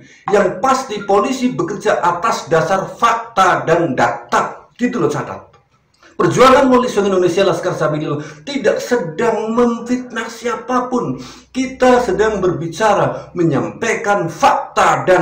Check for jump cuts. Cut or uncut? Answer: uncut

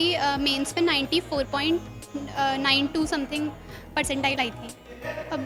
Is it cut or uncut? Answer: uncut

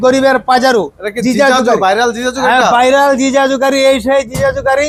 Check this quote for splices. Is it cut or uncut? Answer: uncut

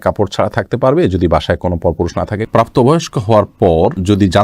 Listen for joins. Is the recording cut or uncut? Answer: cut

